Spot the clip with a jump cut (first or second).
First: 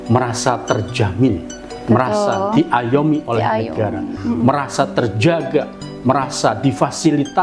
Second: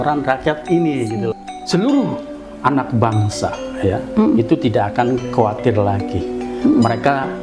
second